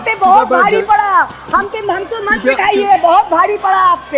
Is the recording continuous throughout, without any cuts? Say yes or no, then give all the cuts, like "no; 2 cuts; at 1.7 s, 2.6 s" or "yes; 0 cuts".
yes; 0 cuts